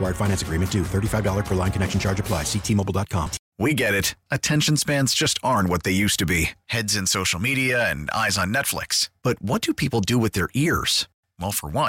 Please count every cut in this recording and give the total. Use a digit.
1